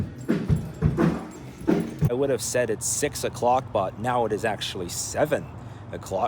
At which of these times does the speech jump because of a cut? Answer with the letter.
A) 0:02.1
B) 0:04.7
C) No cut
A